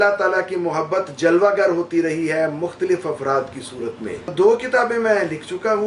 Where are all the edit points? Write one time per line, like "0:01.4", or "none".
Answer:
0:04.3